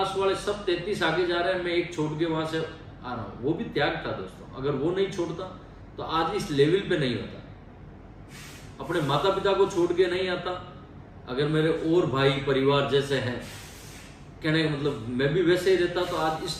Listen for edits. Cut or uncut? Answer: uncut